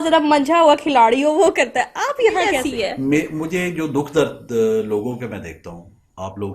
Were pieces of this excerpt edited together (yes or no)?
yes